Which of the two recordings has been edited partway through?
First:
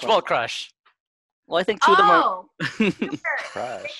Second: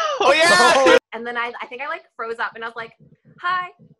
second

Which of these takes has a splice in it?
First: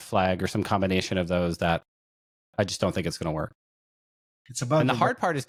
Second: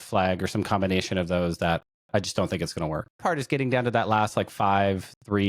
second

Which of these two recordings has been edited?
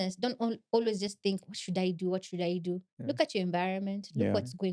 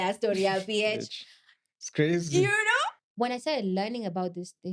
second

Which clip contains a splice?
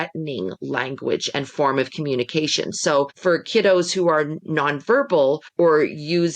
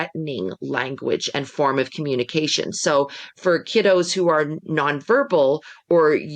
first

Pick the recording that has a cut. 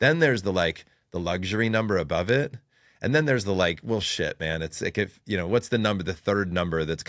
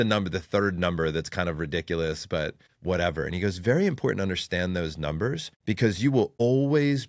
second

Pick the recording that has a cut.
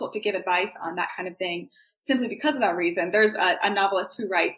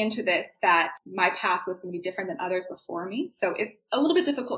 second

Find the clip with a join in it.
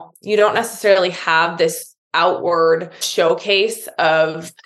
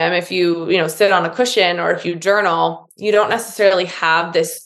first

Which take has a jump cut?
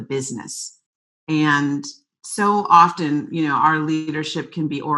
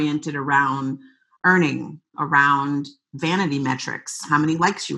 second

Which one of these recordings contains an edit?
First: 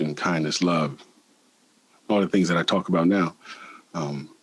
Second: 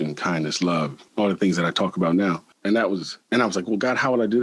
second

